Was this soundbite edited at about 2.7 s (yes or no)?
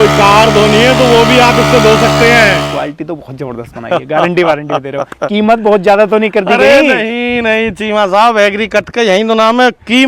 yes